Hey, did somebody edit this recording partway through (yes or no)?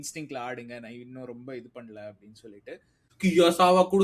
yes